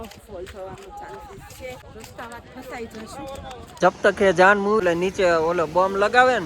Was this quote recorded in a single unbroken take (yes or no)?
no